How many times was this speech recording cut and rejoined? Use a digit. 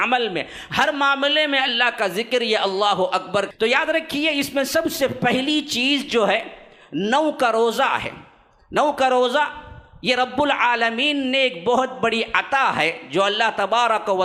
1